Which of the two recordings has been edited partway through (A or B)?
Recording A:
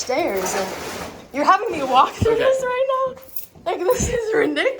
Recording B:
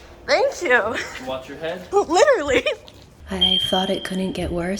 B